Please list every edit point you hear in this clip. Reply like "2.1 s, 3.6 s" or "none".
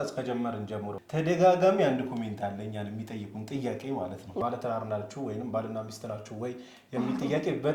1.0 s, 4.4 s